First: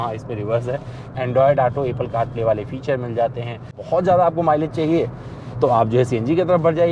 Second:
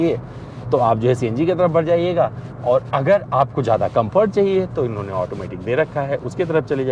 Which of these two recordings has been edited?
first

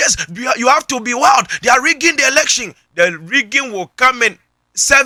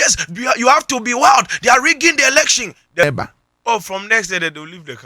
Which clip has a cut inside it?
second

